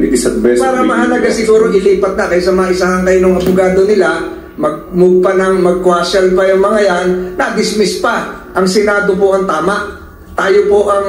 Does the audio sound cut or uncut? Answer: cut